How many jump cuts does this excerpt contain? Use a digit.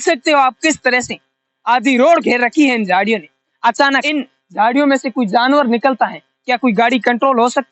1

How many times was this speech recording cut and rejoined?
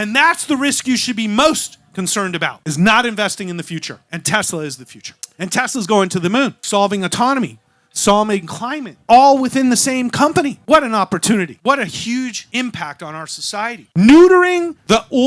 3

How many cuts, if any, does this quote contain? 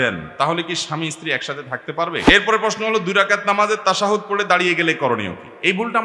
1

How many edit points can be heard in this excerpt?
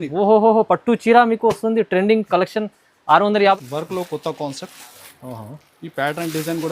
1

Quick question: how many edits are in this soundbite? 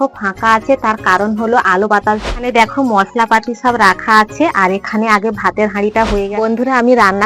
2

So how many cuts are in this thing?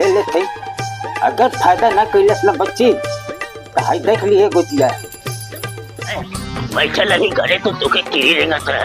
1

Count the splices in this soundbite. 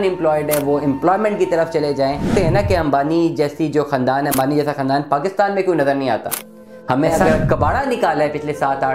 2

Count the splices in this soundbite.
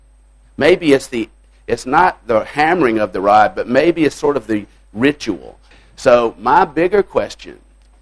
1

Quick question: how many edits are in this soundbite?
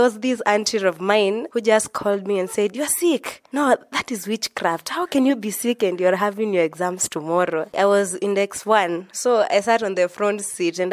3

